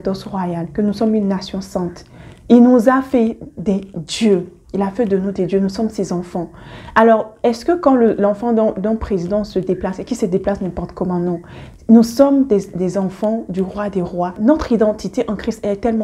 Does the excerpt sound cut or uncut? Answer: cut